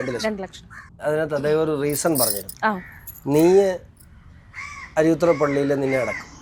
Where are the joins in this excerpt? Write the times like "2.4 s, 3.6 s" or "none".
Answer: 1.0 s